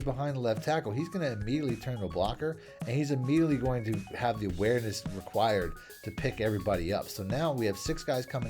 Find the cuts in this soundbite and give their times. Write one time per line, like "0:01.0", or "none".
none